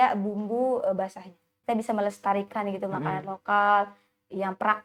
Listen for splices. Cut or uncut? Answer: cut